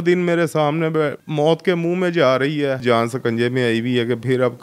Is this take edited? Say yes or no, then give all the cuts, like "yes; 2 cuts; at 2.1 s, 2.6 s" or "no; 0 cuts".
yes; 2 cuts; at 1.2 s, 2.8 s